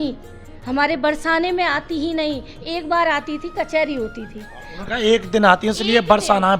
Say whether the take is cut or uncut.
uncut